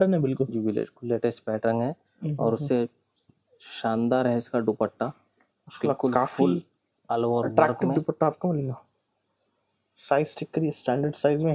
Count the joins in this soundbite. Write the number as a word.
zero